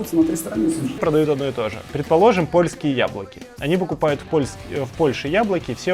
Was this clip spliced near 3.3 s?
no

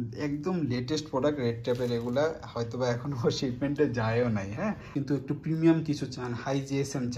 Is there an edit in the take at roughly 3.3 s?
no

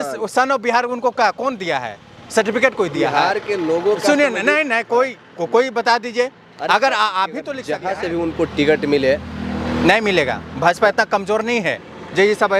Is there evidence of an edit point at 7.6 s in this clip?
yes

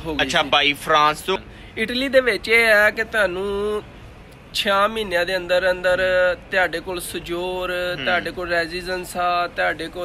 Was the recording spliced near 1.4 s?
yes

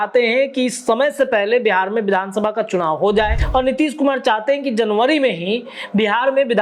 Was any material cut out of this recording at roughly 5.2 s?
no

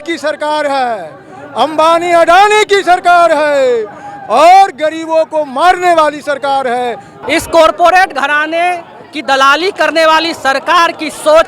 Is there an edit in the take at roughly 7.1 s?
yes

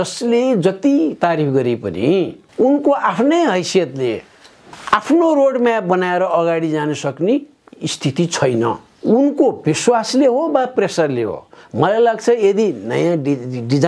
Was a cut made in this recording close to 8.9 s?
yes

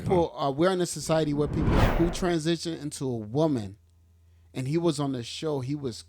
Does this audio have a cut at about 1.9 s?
yes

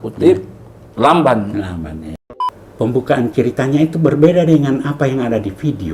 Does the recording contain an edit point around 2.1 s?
yes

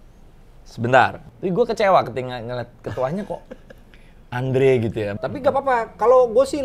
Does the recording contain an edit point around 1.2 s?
yes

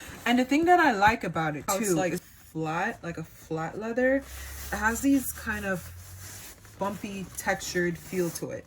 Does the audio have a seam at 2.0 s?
yes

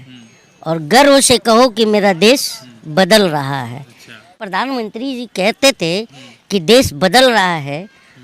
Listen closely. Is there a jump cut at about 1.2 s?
no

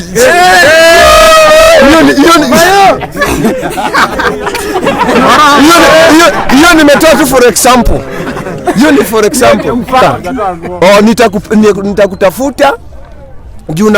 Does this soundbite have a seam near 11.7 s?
no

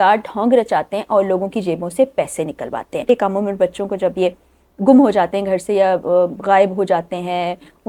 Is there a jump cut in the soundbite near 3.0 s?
yes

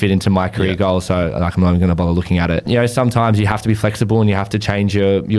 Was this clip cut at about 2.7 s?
yes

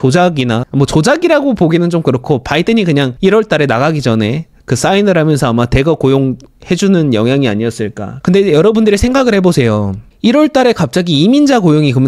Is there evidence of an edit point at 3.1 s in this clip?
yes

